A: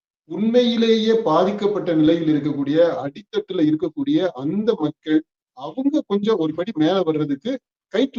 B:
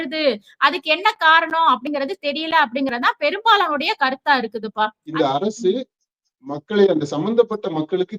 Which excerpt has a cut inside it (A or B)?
B